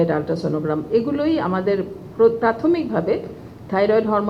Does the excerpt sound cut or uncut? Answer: uncut